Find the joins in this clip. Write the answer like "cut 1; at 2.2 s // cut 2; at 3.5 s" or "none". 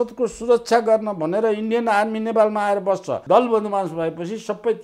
cut 1; at 3.2 s